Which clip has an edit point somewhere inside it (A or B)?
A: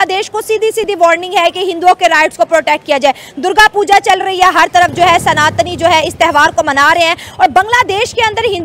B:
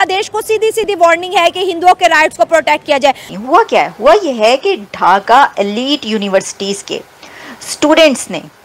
B